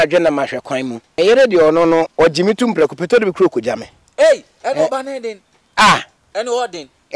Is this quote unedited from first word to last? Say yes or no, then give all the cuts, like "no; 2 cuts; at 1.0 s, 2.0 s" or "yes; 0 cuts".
no; 2 cuts; at 1.0 s, 2.1 s